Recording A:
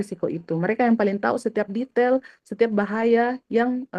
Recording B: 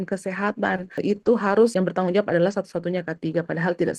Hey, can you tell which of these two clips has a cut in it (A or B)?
B